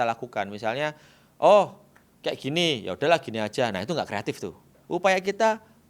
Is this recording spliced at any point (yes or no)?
yes